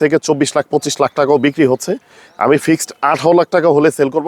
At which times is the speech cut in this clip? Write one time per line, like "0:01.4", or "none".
none

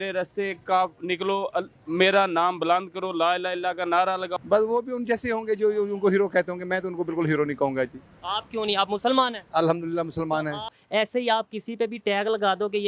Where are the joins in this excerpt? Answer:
0:04.3
0:10.8

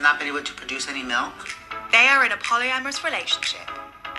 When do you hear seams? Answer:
0:01.5

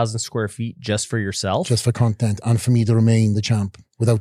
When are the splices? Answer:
none

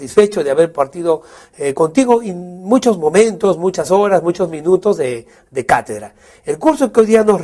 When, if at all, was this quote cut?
0:04.1

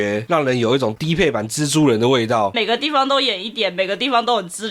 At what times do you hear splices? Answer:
0:02.6

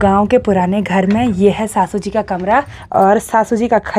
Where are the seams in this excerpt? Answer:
0:02.8

